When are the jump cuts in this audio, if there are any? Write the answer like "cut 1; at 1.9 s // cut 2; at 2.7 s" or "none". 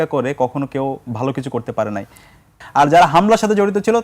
cut 1; at 2.6 s